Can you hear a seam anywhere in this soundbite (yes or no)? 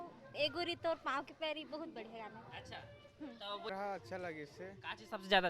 yes